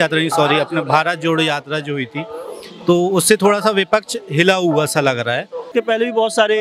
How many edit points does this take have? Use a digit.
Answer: 1